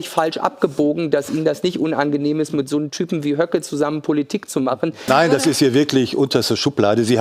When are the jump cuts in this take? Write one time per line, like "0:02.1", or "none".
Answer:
0:05.1

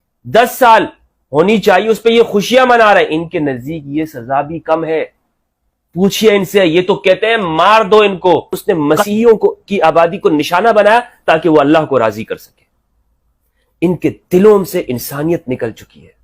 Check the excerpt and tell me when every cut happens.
0:08.6

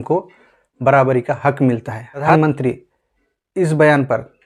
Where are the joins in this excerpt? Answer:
0:02.3

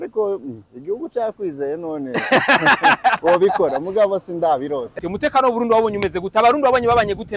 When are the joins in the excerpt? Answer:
0:04.9

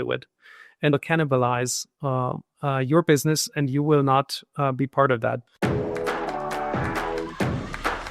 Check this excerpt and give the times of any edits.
0:00.9
0:05.5

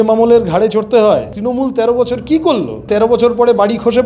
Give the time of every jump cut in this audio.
0:01.4
0:02.9

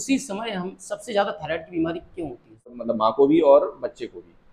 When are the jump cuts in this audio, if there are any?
0:02.8

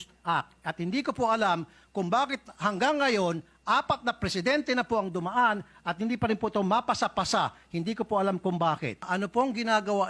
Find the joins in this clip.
0:09.1

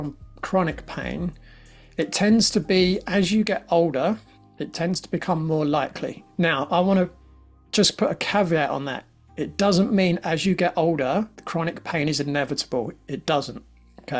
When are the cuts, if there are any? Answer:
0:06.2
0:11.4

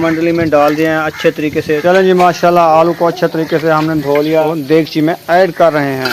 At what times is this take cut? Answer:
0:01.8
0:04.5

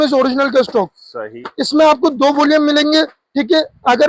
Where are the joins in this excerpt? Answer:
none

